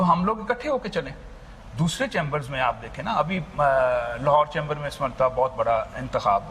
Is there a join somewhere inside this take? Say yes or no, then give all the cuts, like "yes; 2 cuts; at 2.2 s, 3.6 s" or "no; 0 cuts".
no; 0 cuts